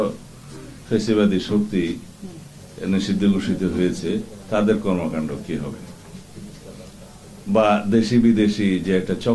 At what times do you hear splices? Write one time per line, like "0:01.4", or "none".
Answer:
none